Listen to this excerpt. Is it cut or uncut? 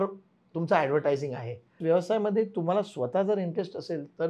cut